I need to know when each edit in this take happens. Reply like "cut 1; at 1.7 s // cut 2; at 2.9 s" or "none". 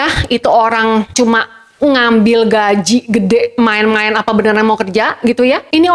none